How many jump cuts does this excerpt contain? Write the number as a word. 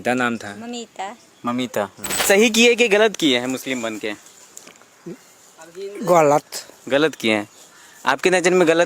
one